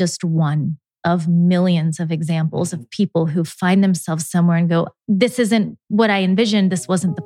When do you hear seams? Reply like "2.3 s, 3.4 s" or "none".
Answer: 0.9 s